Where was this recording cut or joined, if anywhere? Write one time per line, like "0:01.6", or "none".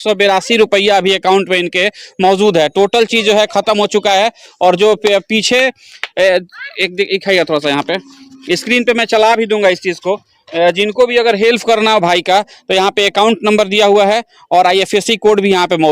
none